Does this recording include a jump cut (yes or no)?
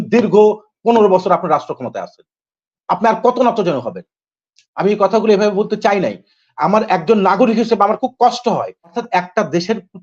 yes